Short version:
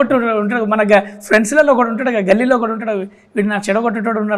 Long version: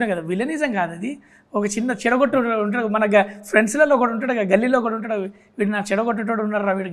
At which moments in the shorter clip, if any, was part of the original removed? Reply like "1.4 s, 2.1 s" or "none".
none